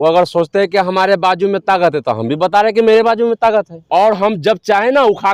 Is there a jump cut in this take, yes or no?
yes